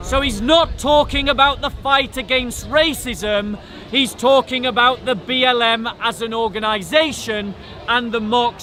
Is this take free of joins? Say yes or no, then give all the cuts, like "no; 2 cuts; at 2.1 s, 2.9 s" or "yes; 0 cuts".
yes; 0 cuts